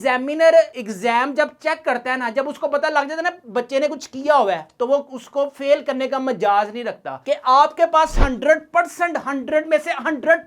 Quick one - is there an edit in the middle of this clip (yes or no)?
yes